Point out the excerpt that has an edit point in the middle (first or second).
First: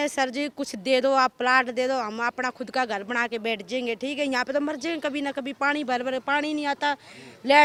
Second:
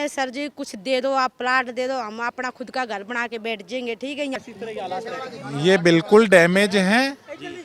second